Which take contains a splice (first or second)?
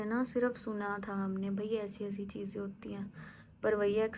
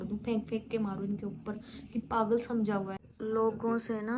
second